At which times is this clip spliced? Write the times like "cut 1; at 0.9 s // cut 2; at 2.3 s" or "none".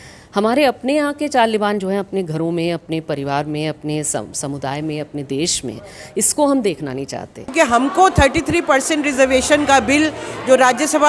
cut 1; at 7.5 s